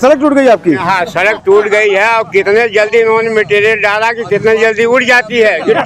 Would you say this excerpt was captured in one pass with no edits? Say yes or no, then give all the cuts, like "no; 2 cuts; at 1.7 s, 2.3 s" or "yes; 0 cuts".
yes; 0 cuts